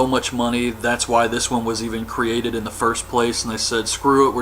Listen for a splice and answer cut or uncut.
cut